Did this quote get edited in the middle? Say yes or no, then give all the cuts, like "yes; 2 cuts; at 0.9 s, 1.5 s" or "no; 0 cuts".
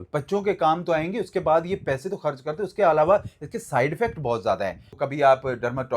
yes; 1 cut; at 4.9 s